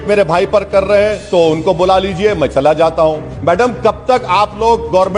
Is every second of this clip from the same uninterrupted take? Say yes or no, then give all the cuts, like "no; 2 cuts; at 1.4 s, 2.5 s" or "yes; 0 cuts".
no; 1 cut; at 3.3 s